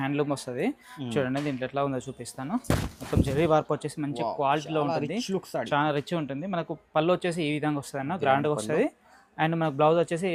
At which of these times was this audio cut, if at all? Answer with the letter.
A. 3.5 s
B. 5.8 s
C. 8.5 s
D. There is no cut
D